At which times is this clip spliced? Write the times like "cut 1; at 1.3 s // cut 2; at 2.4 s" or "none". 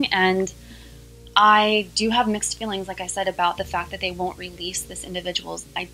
none